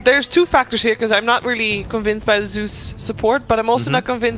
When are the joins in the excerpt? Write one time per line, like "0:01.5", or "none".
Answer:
0:01.8